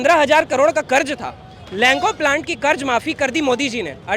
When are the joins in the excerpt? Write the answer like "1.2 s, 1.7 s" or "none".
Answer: none

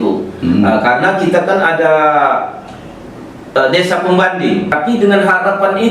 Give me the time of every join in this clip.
4.7 s

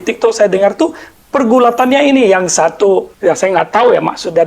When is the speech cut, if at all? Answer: 3.1 s

